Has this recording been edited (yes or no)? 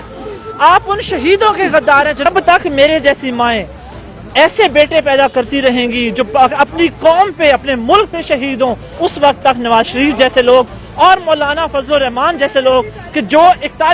yes